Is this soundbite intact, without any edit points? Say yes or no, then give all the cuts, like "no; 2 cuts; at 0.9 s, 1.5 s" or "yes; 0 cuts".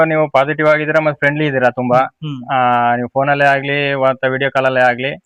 yes; 0 cuts